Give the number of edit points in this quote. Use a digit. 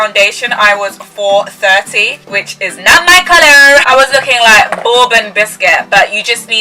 0